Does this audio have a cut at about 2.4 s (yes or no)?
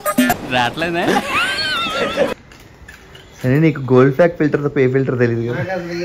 no